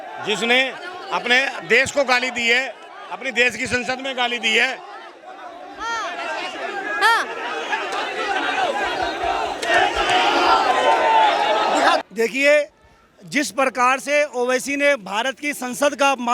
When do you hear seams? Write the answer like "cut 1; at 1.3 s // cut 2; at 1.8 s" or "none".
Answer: cut 1; at 12.0 s